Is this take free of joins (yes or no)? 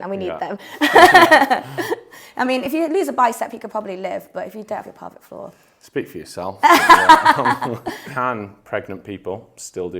no